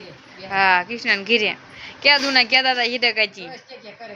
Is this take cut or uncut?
uncut